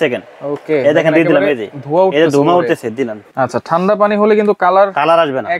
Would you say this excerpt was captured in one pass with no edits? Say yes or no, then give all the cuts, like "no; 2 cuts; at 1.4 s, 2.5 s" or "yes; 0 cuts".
no; 1 cut; at 3.2 s